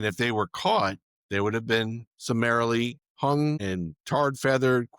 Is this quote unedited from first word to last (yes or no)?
no